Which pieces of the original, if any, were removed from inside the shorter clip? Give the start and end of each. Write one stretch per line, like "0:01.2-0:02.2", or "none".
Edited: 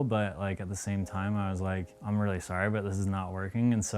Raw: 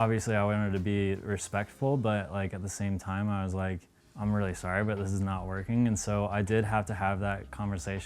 0:03.9-0:04.1